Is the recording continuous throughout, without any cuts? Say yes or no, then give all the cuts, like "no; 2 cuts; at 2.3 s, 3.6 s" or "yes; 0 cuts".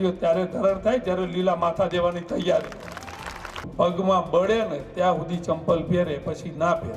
no; 1 cut; at 3.7 s